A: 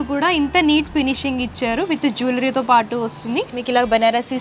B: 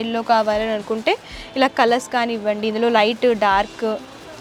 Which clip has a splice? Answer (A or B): A